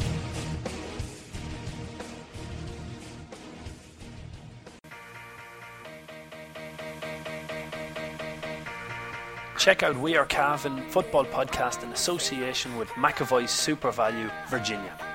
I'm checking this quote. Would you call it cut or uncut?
cut